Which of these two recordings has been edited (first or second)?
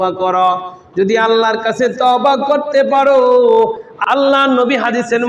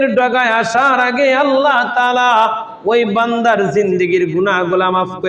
first